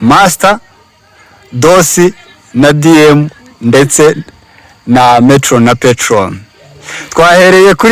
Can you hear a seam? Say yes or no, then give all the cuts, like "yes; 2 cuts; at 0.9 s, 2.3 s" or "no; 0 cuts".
no; 0 cuts